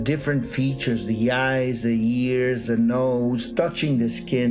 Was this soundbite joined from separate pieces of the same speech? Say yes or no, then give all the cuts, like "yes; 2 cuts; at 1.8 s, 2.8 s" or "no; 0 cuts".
yes; 1 cut; at 3.5 s